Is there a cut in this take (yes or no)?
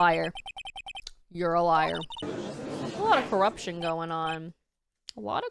yes